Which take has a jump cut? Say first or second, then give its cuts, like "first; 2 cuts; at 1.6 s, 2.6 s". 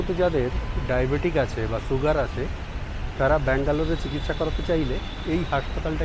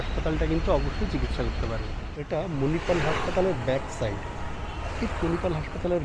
second; 1 cut; at 2.1 s